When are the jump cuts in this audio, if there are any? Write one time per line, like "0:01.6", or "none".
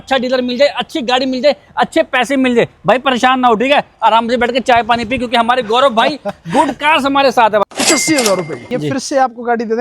0:07.6
0:08.6